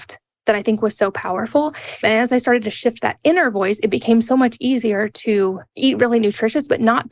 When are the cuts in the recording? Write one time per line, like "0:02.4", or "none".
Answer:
0:02.0
0:05.7